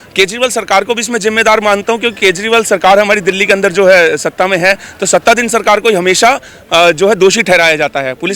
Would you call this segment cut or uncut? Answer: uncut